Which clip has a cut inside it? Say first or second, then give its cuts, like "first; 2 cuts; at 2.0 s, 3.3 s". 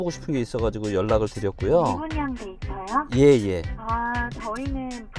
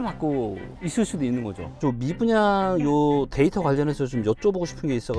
second; 1 cut; at 1.8 s